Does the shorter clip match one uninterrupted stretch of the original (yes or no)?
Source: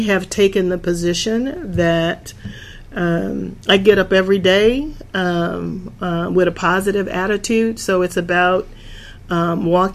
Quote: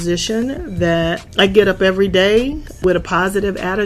no